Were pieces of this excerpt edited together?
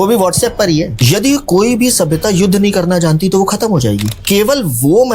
yes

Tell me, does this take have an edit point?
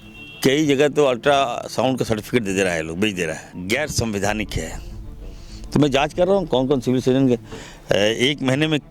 yes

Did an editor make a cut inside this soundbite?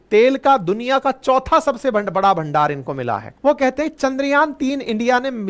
yes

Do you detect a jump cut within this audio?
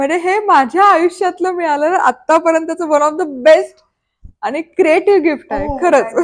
no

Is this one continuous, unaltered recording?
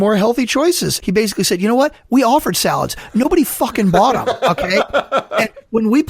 no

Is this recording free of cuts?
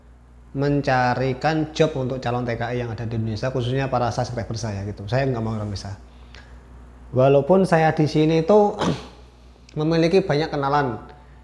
yes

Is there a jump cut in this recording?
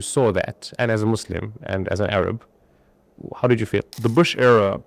yes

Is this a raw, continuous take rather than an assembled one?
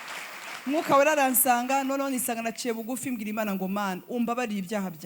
yes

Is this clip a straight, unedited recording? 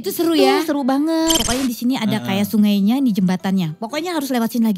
no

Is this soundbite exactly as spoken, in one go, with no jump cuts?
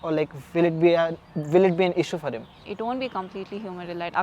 no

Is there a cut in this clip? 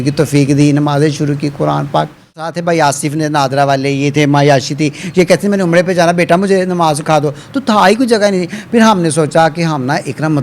yes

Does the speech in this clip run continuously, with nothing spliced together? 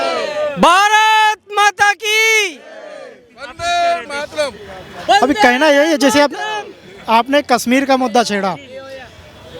yes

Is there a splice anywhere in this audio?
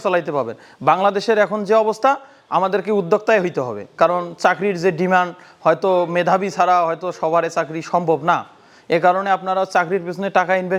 no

